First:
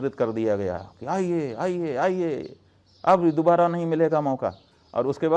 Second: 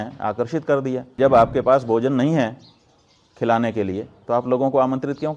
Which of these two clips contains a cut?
second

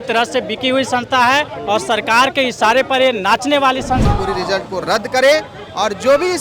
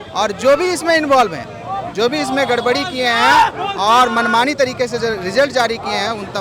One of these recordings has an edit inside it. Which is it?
first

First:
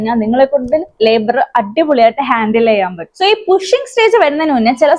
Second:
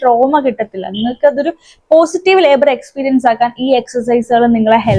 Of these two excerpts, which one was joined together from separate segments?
first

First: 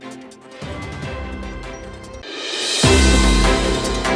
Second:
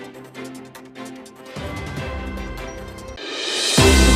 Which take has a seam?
second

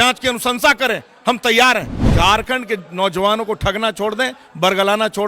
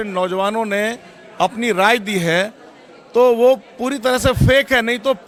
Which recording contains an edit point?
first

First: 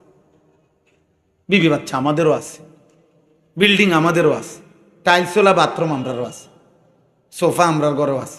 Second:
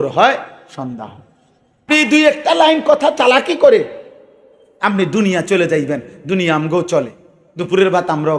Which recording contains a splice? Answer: second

